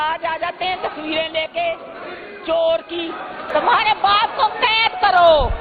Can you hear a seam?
yes; 1 cut; at 3.5 s

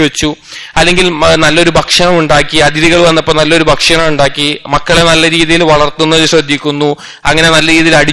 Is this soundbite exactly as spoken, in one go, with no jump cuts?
yes; 0 cuts

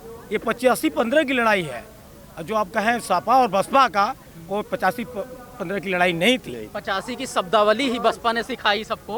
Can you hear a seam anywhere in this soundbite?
no; 0 cuts

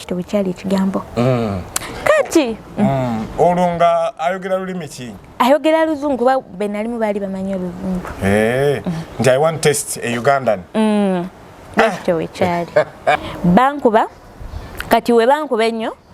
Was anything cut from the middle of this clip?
yes; 1 cut; at 13.3 s

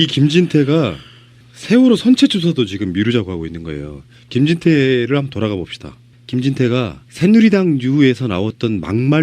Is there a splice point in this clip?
yes; 1 cut; at 7.2 s

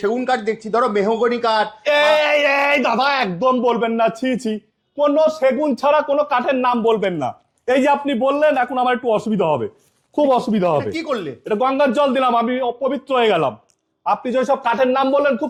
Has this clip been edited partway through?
no; 0 cuts

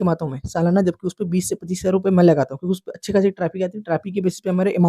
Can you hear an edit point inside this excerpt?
no; 0 cuts

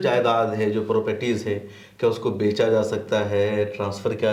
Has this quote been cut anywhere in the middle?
no; 0 cuts

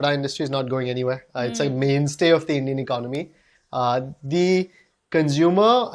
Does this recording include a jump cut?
no; 0 cuts

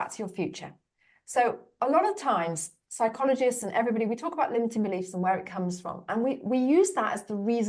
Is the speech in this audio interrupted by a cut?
yes; 1 cut; at 1.7 s

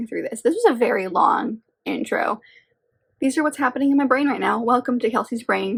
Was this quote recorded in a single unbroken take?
yes; 0 cuts

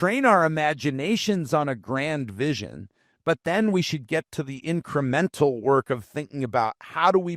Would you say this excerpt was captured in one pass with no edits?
yes; 0 cuts

